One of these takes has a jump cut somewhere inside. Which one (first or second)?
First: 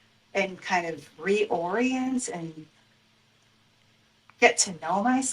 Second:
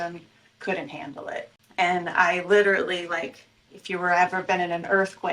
second